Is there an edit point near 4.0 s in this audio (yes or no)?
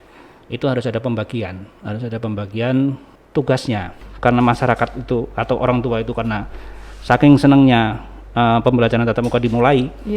yes